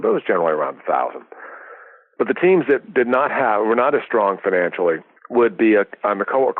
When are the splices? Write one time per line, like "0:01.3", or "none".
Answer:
0:05.1